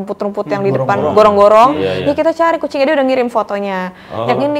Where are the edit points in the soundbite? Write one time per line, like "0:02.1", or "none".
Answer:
none